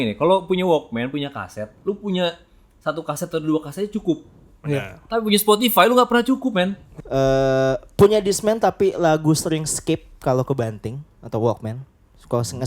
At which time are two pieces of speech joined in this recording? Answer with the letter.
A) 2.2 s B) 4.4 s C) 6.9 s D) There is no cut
C